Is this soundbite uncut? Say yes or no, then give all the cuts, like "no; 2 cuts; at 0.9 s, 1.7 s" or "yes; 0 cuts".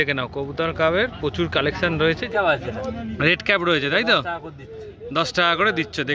no; 1 cut; at 2.2 s